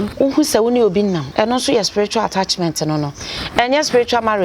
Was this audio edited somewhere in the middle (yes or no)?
yes